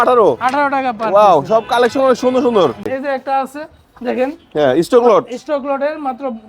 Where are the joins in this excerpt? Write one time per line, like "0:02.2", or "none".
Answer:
0:02.9